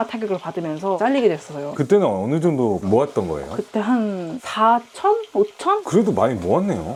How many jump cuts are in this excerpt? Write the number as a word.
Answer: zero